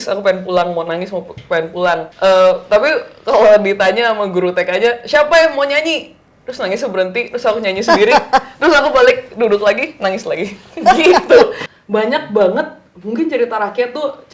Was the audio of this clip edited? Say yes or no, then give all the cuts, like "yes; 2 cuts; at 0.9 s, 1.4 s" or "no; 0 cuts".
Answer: yes; 2 cuts; at 2.1 s, 11.6 s